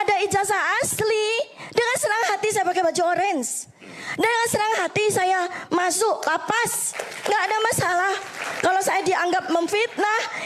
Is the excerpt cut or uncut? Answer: uncut